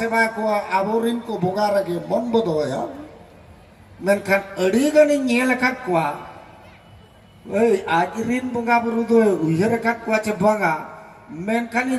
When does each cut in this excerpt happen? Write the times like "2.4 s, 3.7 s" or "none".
none

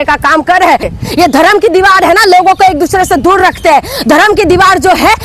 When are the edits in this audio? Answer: 1.0 s

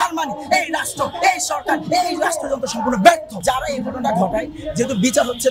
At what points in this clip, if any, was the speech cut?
3.4 s

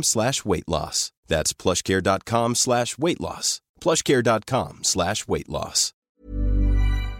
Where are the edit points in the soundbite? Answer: 6.1 s

